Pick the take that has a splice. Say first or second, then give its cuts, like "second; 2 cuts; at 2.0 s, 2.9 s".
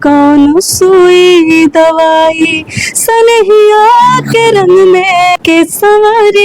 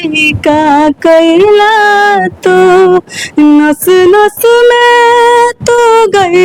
first; 1 cut; at 5.4 s